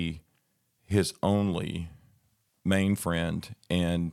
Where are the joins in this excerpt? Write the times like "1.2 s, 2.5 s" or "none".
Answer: none

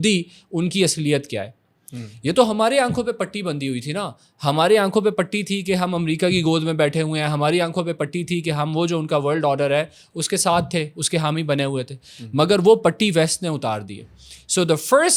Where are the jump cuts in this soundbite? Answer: none

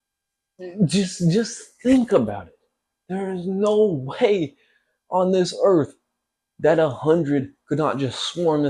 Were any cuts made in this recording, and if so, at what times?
none

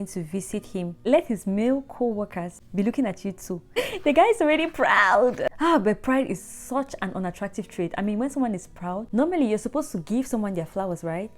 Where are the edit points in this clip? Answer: 1.0 s, 2.6 s, 3.8 s, 5.5 s, 9.0 s

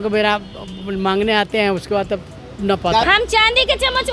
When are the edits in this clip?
3.0 s

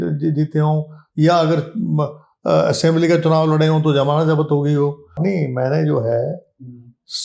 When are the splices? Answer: 5.1 s

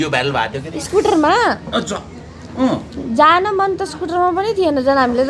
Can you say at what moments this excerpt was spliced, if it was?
none

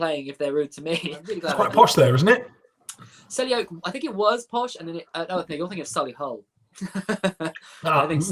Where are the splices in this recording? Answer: 1.4 s

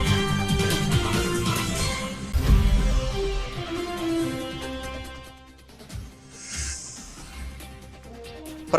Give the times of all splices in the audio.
2.2 s

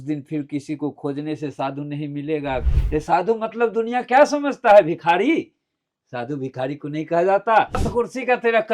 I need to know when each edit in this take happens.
2.7 s, 7.9 s

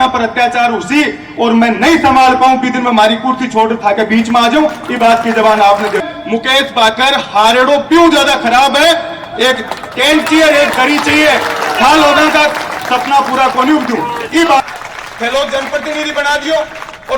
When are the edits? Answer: 6.1 s, 14.6 s

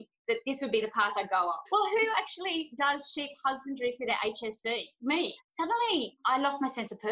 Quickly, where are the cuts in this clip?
1.6 s, 5.4 s

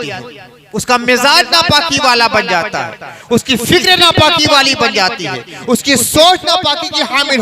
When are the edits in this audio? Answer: none

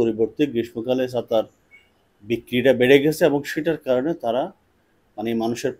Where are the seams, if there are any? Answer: none

